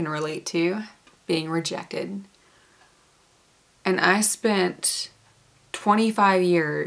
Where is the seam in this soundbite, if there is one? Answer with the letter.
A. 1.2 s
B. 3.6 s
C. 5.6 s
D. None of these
B